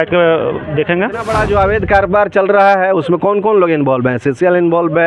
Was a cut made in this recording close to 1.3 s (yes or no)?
yes